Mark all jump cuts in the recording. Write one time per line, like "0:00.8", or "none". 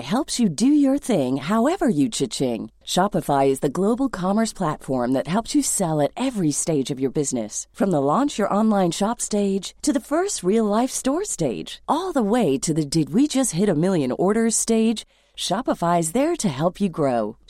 none